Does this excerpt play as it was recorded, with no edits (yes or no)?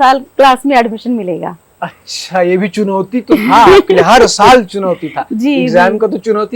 yes